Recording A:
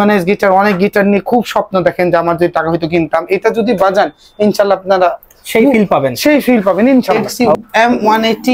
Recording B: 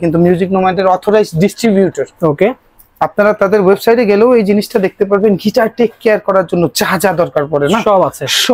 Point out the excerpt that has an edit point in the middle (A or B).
A